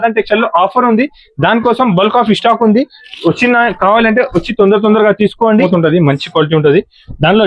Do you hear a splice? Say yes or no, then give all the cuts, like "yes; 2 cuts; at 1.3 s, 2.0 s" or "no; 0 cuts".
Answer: yes; 1 cut; at 5.7 s